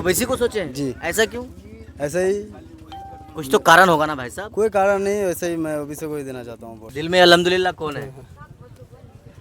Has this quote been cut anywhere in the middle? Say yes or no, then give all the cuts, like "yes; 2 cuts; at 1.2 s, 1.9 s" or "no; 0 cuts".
yes; 1 cut; at 6.8 s